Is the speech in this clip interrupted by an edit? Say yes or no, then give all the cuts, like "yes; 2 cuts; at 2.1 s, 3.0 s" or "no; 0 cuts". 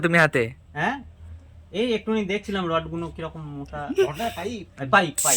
no; 0 cuts